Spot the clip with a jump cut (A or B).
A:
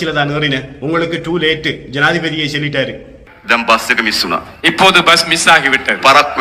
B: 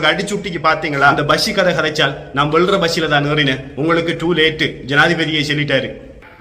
B